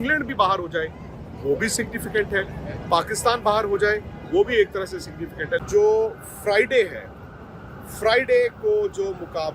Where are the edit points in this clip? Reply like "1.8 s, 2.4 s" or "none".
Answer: 5.6 s